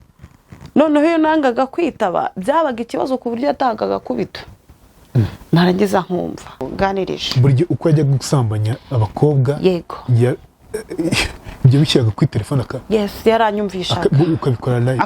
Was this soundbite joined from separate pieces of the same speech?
yes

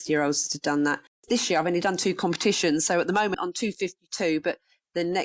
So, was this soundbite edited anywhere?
yes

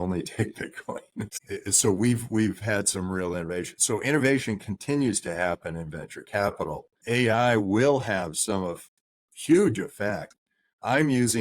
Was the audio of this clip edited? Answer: yes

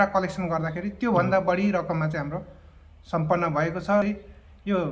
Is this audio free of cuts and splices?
no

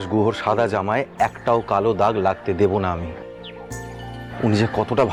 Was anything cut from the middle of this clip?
no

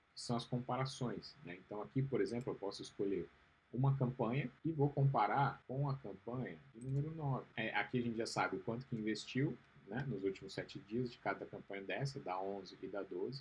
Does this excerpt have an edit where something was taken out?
yes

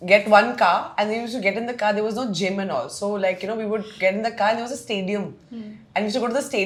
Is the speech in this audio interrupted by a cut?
no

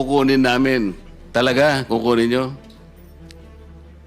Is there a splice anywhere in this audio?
yes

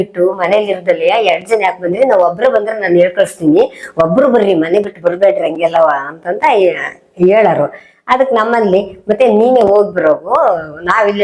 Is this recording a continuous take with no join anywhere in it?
yes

